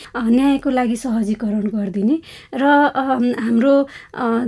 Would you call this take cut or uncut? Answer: uncut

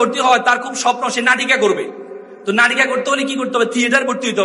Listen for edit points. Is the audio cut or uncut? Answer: uncut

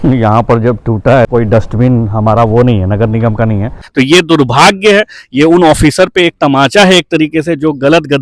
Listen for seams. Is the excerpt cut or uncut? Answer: cut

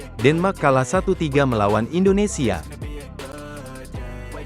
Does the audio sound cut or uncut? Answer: cut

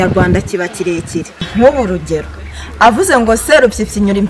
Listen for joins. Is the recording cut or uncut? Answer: cut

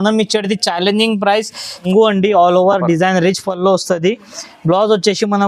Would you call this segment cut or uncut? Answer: cut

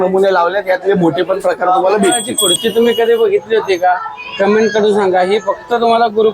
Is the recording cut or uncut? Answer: cut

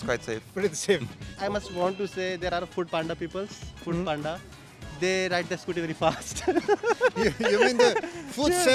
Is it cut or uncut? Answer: uncut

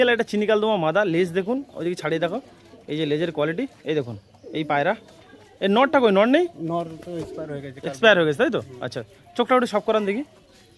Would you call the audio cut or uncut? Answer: uncut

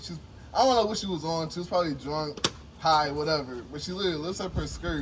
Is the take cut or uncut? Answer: uncut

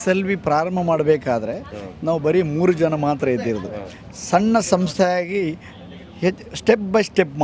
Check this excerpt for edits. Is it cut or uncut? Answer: uncut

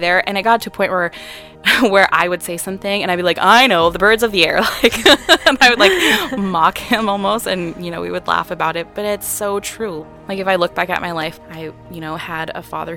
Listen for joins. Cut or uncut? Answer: cut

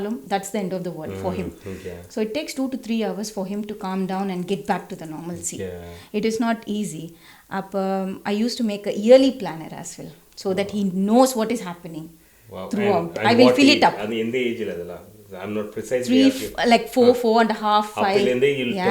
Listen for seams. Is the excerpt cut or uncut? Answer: uncut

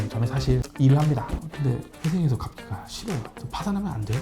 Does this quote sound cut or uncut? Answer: cut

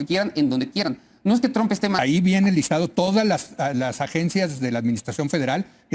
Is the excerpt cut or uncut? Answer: cut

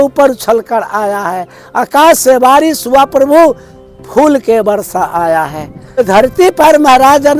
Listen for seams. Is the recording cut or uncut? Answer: cut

